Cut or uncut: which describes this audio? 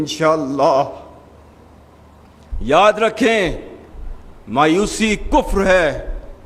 uncut